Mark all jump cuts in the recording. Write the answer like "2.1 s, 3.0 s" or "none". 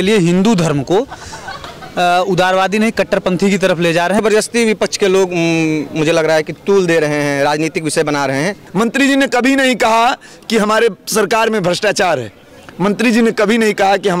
4.2 s, 8.6 s

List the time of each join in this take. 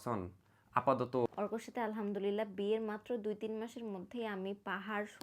1.3 s

